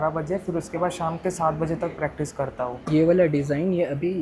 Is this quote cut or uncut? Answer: cut